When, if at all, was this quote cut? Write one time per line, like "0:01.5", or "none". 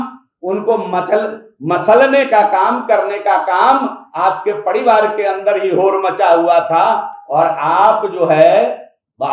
none